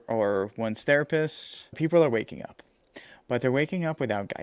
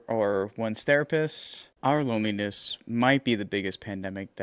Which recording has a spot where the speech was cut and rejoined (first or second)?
first